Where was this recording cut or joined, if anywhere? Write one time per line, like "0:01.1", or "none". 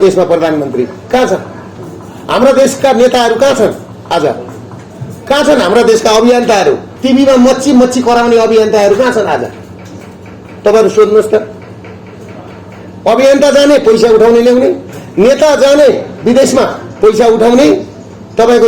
0:06.9